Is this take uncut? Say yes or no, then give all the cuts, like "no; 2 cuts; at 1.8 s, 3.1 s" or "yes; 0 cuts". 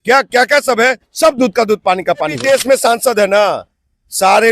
no; 1 cut; at 2.4 s